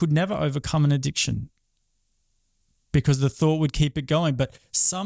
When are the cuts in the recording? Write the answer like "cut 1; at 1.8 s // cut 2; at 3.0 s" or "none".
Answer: none

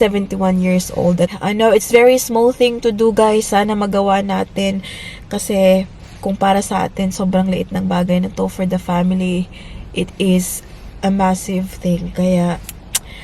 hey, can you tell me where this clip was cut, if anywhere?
cut 1; at 1.3 s

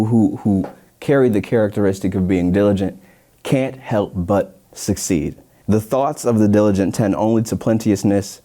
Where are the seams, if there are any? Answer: cut 1; at 5.5 s

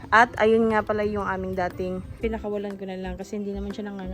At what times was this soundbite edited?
cut 1; at 2.2 s

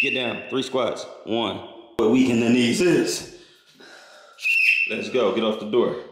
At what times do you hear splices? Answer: cut 1; at 2.0 s

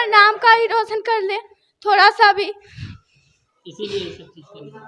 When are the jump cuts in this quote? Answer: none

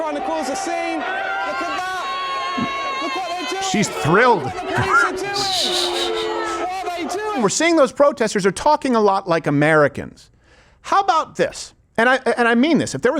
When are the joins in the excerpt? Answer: cut 1; at 7.4 s

